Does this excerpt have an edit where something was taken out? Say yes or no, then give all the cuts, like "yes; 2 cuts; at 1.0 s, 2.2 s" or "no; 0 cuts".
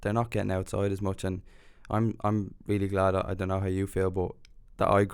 no; 0 cuts